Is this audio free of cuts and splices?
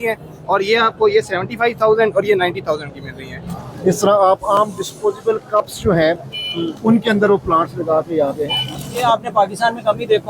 no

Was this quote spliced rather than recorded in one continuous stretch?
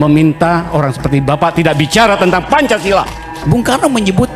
yes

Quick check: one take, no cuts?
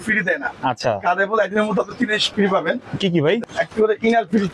no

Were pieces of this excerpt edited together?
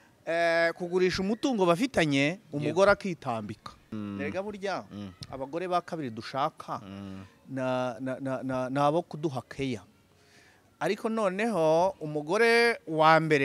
yes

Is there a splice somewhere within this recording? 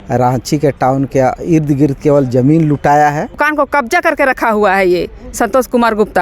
yes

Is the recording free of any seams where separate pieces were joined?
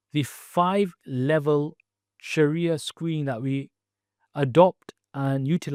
yes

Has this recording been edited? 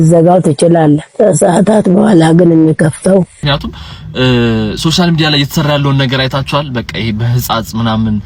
yes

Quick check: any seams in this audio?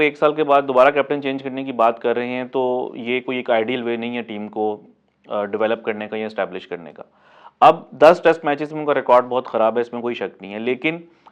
no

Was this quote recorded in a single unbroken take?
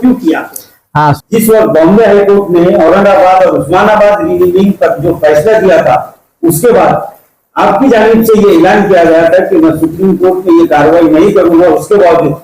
no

